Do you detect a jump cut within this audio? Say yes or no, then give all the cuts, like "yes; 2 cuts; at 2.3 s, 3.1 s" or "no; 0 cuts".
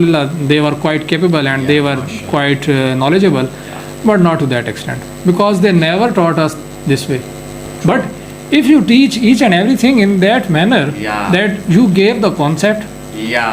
yes; 1 cut; at 7.6 s